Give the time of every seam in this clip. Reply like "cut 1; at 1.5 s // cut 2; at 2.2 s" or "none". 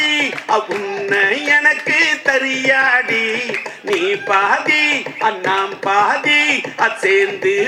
none

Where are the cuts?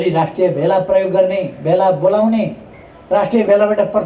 none

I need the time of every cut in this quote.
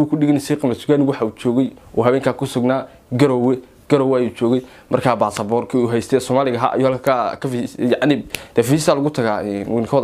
none

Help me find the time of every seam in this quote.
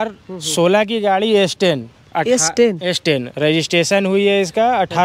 none

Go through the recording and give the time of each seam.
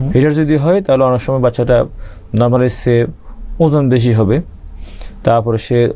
none

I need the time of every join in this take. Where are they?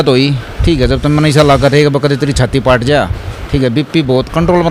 none

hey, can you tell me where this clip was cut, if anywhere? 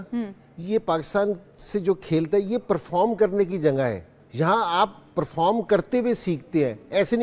cut 1; at 4.2 s

